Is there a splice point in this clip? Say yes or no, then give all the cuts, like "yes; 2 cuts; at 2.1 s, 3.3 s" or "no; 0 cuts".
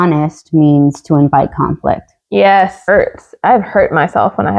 yes; 1 cut; at 2.8 s